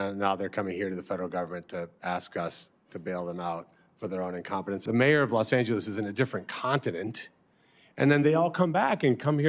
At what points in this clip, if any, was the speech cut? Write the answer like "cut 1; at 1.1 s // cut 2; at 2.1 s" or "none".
cut 1; at 4.8 s